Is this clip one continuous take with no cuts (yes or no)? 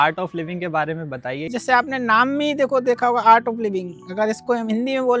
no